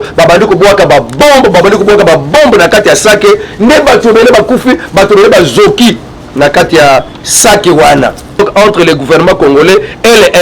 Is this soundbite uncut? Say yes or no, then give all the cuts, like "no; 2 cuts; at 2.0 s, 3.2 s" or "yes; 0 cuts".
no; 1 cut; at 8.4 s